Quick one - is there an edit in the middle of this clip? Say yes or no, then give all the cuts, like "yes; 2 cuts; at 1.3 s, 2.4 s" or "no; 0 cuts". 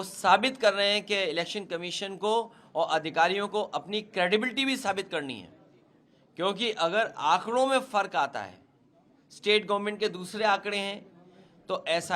no; 0 cuts